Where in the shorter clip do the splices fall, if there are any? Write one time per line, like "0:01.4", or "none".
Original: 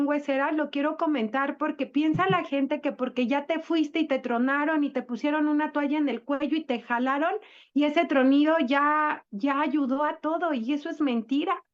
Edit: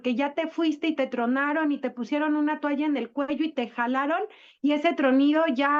none